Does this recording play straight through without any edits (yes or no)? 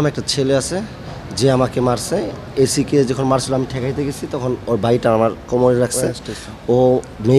yes